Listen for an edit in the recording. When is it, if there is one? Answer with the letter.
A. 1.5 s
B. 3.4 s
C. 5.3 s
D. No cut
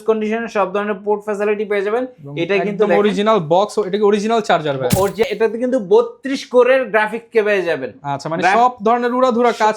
C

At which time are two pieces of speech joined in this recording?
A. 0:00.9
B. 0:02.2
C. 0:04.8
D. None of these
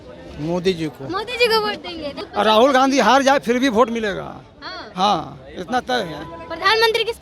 B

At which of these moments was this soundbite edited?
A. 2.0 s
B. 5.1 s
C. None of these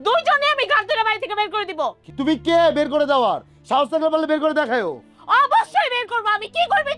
A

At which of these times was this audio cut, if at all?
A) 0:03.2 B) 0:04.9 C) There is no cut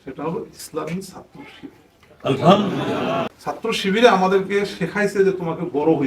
A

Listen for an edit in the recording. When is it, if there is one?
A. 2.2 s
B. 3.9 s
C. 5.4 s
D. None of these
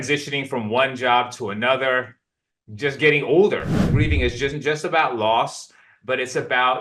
B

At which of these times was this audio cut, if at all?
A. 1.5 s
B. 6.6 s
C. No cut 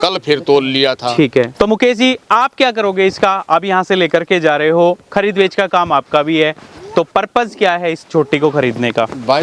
A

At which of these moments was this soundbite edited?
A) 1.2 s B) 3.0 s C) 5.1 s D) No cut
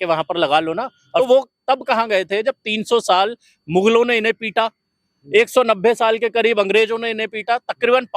A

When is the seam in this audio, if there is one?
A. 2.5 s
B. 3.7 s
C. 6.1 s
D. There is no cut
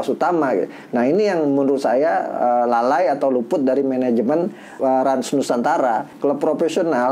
C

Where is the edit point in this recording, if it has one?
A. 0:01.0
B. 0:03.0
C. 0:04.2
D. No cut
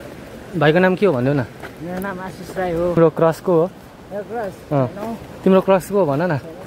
B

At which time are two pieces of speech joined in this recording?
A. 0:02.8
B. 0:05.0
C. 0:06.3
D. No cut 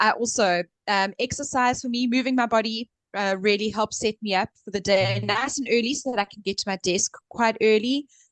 D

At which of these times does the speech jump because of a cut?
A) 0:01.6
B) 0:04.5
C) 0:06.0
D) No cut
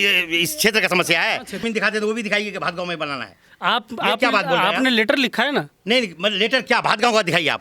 A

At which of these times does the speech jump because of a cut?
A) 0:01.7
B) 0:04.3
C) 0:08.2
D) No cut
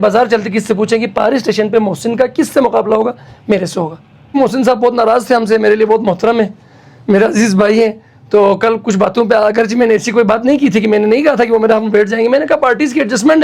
B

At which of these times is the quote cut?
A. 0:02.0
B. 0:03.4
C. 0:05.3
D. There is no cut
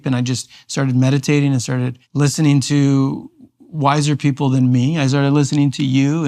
A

